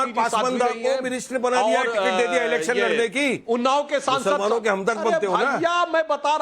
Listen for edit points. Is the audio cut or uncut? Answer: cut